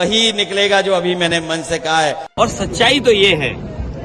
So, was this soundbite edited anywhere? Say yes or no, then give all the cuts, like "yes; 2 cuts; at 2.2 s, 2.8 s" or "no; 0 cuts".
yes; 1 cut; at 2.3 s